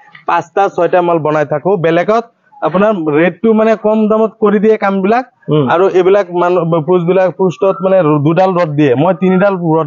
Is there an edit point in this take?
no; 0 cuts

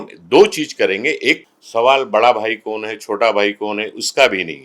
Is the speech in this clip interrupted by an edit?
yes; 1 cut; at 1.4 s

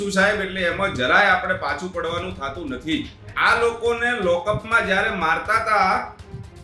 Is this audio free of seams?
no; 1 cut; at 3.3 s

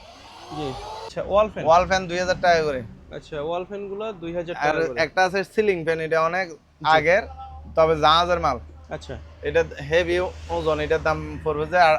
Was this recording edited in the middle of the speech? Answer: yes; 1 cut; at 1.1 s

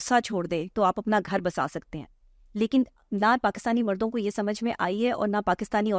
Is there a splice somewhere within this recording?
no; 0 cuts

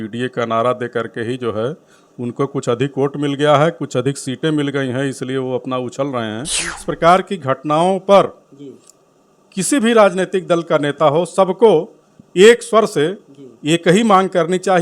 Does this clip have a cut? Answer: yes; 1 cut; at 6.8 s

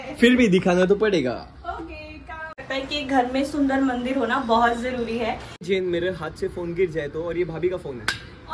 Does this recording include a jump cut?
yes; 2 cuts; at 2.6 s, 5.7 s

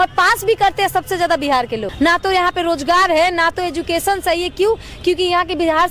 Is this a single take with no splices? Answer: no; 1 cut; at 1.9 s

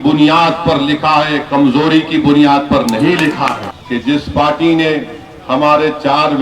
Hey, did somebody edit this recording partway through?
yes; 1 cut; at 3.7 s

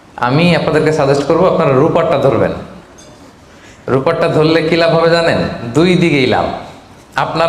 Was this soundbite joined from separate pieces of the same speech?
no; 0 cuts

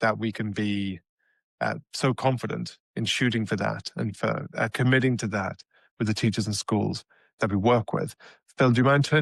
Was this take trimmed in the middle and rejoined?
no; 0 cuts

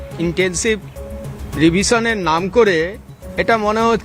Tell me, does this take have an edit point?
no; 0 cuts

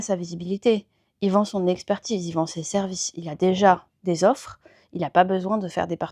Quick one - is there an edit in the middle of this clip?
no; 0 cuts

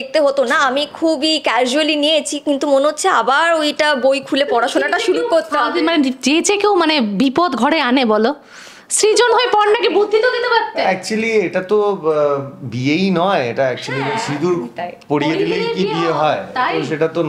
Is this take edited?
no; 0 cuts

